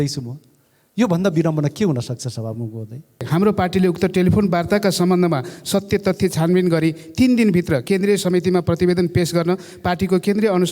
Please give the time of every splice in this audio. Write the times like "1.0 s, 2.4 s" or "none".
3.3 s